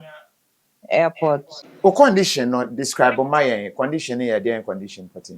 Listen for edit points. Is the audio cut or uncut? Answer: cut